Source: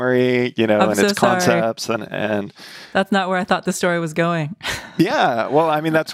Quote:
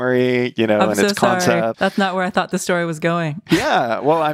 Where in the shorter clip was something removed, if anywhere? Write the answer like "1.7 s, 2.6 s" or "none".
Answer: 1.8 s, 3.4 s